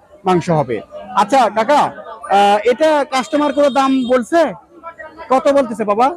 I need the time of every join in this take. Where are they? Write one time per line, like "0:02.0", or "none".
none